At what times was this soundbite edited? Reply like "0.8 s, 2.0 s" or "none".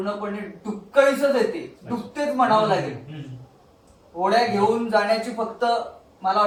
none